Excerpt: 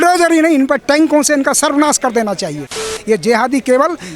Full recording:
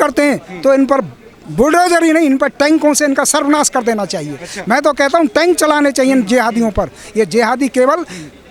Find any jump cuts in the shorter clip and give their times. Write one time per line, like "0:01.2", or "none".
0:02.9